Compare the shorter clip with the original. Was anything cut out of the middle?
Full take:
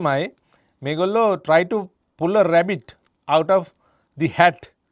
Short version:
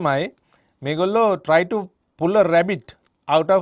no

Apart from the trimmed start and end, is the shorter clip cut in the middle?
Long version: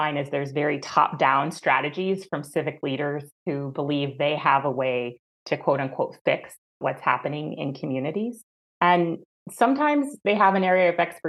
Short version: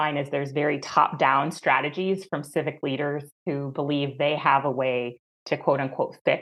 no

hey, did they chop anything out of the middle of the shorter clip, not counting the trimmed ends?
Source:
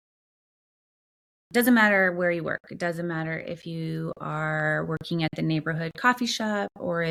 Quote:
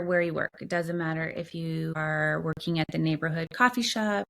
yes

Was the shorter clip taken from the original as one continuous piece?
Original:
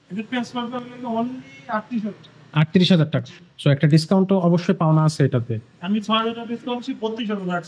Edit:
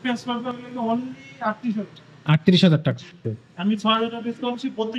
no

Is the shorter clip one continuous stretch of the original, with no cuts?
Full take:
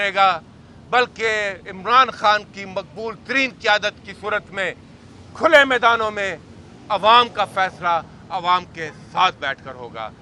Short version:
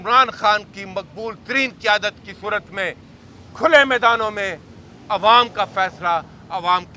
yes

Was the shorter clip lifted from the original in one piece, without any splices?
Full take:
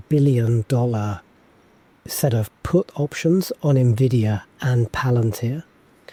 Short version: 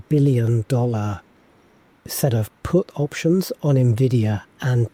yes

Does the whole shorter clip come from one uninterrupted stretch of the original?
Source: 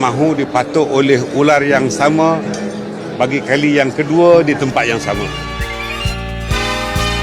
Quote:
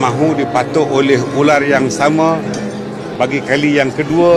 yes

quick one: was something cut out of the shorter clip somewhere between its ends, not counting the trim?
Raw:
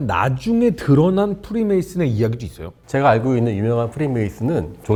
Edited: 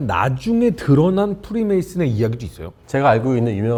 no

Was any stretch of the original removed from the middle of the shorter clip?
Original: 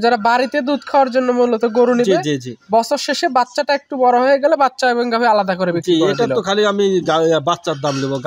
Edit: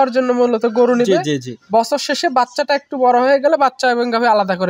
no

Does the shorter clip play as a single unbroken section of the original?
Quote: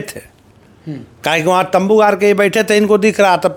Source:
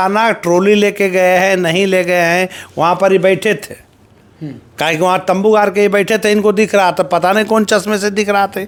yes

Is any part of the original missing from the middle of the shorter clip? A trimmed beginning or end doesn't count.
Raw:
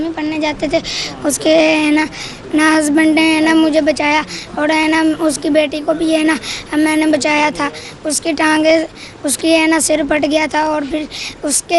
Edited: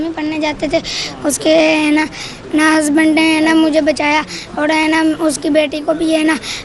no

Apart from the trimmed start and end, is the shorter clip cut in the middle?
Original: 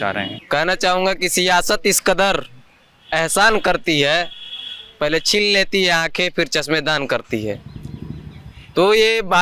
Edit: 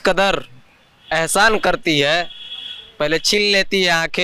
no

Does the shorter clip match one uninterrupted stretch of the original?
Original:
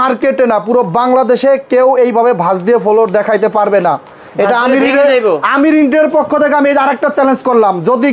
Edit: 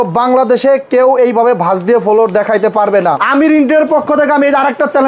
no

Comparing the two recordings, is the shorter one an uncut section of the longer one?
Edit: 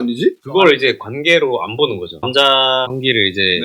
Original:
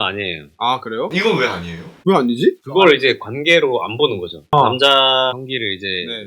no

